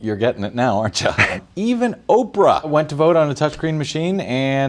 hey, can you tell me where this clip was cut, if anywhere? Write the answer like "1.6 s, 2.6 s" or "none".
1.3 s, 2.7 s